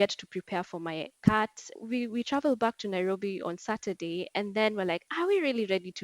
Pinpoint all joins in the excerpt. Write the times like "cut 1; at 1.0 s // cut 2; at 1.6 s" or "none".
cut 1; at 1.7 s